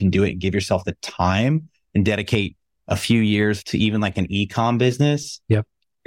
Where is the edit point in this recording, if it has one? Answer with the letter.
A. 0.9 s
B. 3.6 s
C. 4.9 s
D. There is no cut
B